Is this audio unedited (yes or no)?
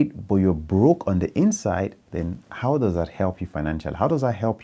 yes